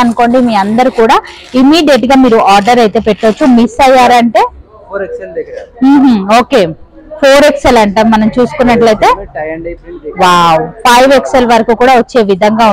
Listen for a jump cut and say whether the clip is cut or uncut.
uncut